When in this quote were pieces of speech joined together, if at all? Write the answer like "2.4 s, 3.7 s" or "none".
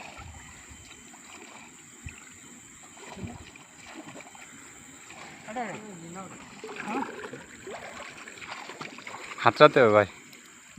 2.2 s